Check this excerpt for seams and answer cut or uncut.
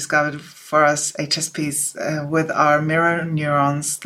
uncut